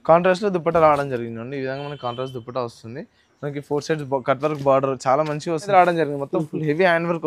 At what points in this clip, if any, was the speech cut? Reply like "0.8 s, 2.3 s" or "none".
5.7 s